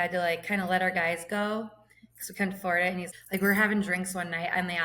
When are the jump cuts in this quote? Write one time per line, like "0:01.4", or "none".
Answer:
0:03.0